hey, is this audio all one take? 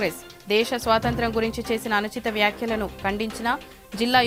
yes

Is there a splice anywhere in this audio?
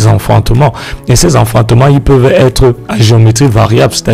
no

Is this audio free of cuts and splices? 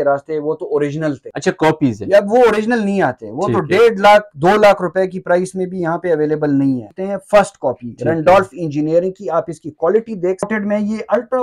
no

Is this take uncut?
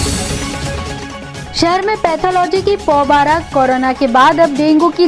yes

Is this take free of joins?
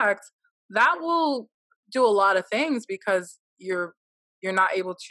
no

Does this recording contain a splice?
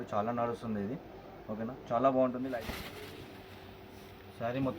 yes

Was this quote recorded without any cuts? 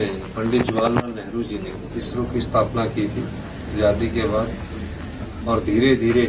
yes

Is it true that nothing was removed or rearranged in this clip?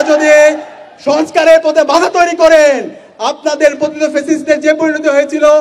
yes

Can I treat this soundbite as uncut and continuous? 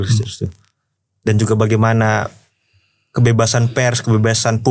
yes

